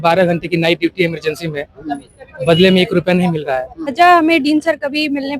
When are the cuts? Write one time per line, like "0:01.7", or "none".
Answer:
0:03.8